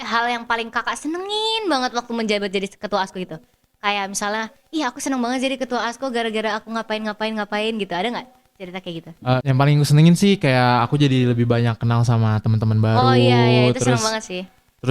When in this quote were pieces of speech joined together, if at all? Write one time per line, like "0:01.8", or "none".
0:09.4

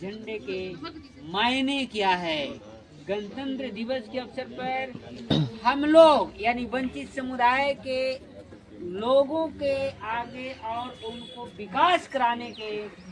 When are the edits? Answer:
none

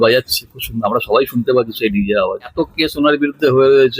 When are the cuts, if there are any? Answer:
0:02.5

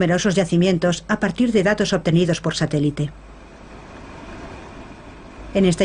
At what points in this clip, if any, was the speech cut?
0:02.4

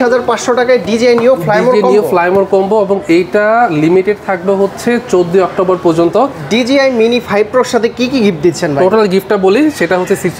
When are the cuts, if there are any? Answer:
0:06.4

